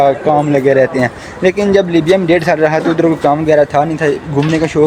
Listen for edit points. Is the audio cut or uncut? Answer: uncut